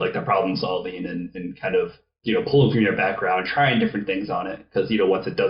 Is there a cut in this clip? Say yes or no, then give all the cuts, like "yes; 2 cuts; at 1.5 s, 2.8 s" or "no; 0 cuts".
no; 0 cuts